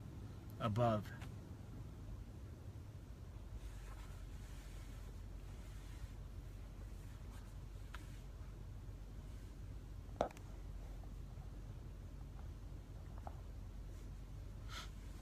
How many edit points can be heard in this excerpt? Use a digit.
0